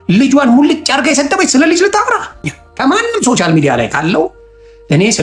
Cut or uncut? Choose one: cut